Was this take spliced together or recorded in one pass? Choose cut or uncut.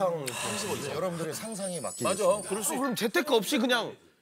cut